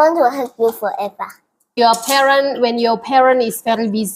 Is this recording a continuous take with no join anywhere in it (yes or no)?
no